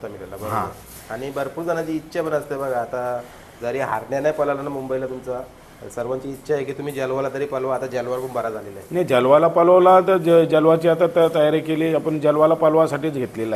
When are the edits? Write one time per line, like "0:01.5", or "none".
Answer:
none